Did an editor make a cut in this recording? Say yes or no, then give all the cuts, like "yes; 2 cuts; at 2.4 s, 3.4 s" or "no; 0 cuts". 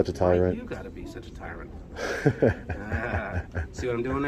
no; 0 cuts